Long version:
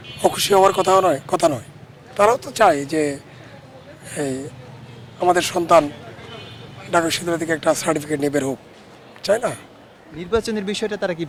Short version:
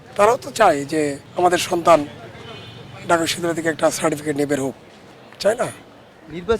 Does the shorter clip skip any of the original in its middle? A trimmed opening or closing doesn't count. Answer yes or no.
yes